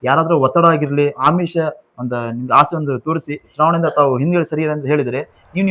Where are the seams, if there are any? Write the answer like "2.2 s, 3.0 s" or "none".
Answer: 1.2 s, 3.5 s